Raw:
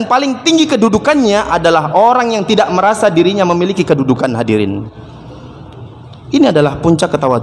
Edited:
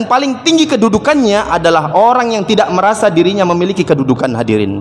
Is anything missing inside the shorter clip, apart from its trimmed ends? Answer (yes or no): no